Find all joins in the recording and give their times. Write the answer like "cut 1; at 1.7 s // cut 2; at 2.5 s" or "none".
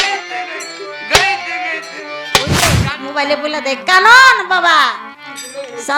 cut 1; at 2.8 s

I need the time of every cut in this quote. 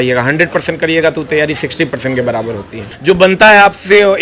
cut 1; at 2.9 s

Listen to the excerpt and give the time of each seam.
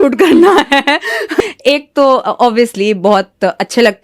cut 1; at 1.4 s

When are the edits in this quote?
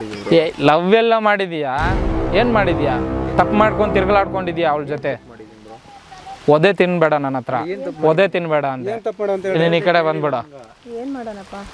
none

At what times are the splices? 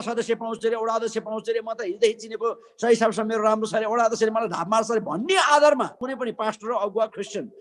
cut 1; at 6.1 s

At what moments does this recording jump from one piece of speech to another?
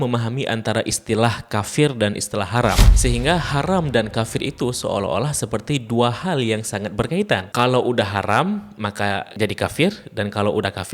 cut 1; at 2.9 s

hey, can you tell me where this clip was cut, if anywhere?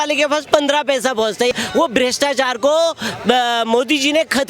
cut 1; at 1.5 s

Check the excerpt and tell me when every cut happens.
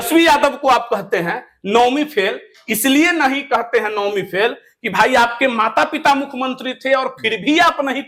none

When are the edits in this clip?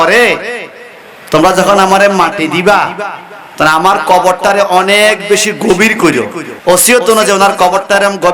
cut 1; at 6.4 s

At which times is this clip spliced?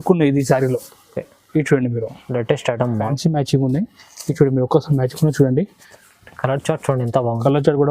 cut 1; at 3.1 s

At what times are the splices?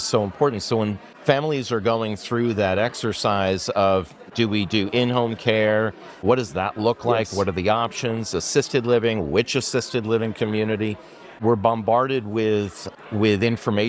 cut 1; at 1.1 s // cut 2; at 4.2 s // cut 3; at 6.2 s // cut 4; at 11.4 s

